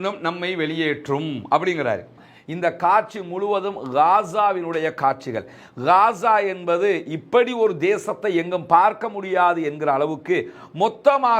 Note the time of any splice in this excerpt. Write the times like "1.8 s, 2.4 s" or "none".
2.3 s